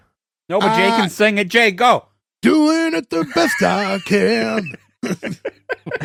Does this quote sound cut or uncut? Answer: uncut